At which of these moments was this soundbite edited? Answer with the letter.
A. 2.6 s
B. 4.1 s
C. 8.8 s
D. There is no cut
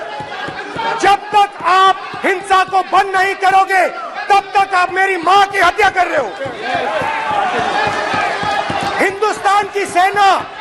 C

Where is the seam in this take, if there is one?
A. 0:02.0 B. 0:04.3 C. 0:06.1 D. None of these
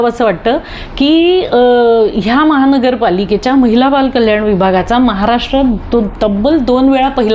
D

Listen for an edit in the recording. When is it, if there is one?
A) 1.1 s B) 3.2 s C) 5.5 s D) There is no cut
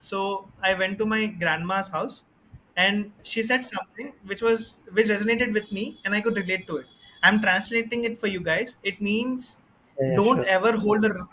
B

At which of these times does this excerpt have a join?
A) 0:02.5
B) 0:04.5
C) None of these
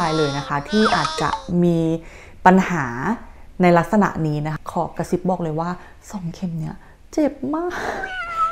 B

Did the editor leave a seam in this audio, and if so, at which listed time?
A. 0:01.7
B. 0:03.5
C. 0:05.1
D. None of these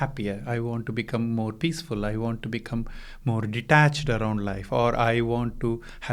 D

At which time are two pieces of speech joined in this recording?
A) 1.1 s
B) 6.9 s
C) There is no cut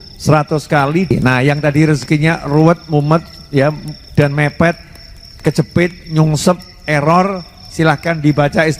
A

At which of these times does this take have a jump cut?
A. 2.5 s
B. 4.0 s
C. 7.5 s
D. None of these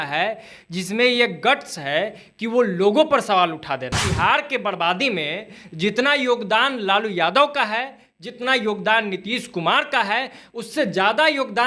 B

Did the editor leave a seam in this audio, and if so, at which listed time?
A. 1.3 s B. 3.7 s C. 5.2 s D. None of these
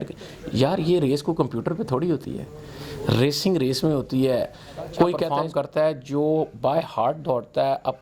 C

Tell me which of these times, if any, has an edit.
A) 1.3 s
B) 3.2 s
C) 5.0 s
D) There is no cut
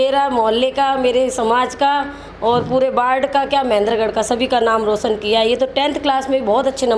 D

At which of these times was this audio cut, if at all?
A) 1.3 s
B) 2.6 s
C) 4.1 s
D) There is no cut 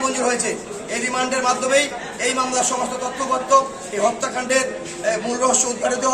D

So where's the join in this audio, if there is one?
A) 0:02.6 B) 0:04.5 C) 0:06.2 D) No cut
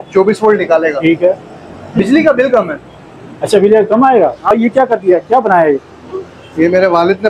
B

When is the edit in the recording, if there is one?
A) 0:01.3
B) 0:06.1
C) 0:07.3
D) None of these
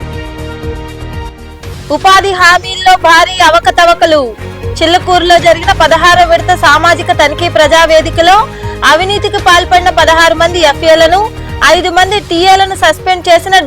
A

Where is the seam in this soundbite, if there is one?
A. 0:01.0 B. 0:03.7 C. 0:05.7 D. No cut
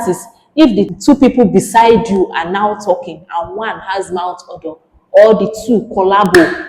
A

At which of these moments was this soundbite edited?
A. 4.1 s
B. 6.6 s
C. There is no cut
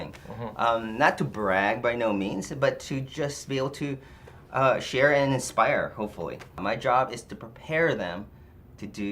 B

